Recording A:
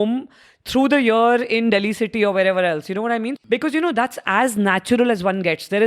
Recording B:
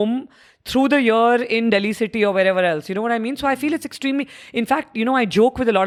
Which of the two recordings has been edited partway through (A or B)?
A